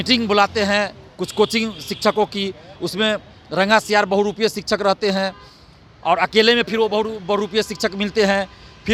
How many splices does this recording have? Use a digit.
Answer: 0